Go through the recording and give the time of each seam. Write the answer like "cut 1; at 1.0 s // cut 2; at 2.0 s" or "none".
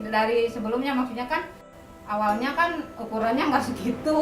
cut 1; at 1.7 s